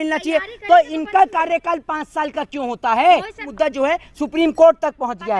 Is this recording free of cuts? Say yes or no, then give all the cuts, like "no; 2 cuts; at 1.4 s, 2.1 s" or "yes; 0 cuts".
no; 1 cut; at 3.4 s